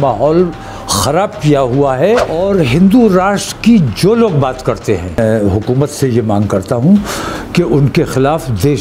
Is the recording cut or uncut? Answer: cut